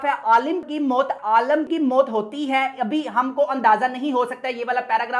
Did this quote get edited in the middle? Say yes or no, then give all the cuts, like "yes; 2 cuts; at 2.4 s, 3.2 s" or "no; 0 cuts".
no; 0 cuts